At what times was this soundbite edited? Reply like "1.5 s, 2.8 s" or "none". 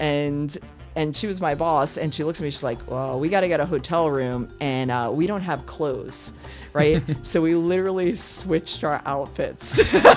none

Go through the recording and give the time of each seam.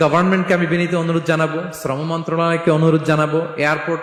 none

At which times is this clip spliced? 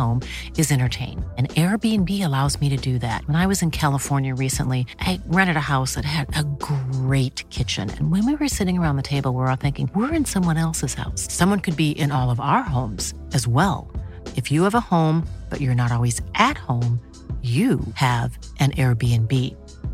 none

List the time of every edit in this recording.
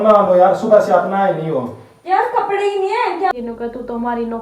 3.3 s

